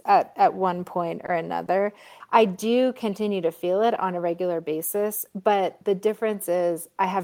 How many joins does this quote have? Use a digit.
2